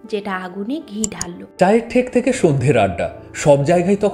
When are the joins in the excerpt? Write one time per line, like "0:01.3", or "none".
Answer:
0:01.4